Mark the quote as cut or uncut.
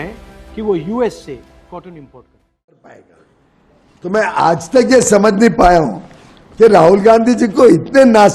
cut